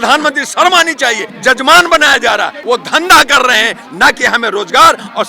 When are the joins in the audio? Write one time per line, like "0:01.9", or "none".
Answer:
0:01.3
0:02.6